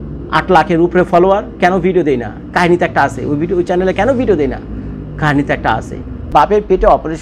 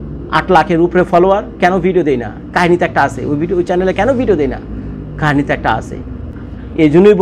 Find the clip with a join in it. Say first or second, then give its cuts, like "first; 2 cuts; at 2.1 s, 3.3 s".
first; 1 cut; at 6.3 s